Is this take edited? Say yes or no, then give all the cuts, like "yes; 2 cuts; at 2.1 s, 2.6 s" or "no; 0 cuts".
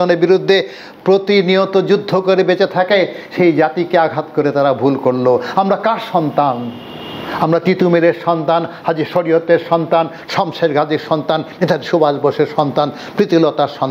no; 0 cuts